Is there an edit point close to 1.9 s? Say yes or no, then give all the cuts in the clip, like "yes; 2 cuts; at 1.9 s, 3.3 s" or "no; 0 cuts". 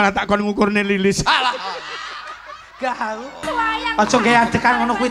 no; 1 cut; at 3.5 s